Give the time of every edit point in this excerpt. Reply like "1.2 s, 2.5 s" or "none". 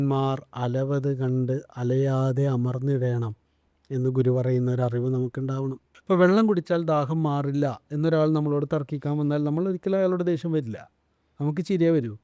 5.9 s

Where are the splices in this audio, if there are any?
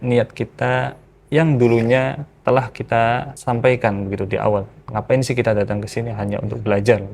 2.3 s, 3.3 s

